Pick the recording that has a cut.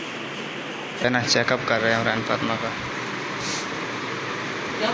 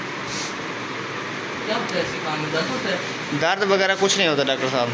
first; 1 cut; at 1.1 s

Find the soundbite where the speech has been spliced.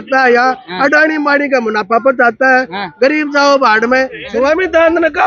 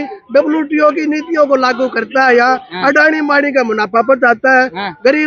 first; 1 cut; at 4.2 s

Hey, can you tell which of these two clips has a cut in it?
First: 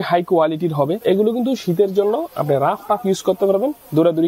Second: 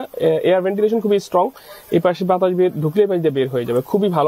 first; 1 cut; at 1.0 s

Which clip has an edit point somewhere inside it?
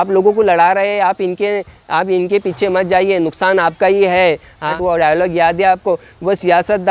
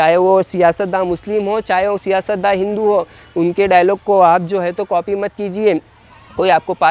first; 1 cut; at 4.7 s

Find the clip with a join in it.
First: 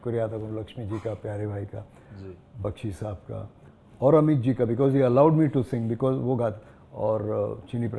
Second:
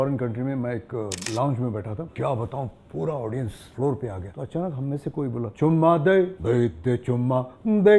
second; 6 cuts; at 1.2 s, 2.1 s, 3.6 s, 4.3 s, 5.5 s, 6.4 s

